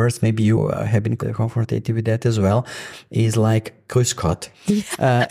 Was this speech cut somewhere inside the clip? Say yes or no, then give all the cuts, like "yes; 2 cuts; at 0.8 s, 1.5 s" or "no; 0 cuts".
no; 0 cuts